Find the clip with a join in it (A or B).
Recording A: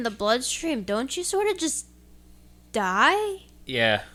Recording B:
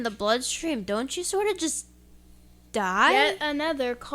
B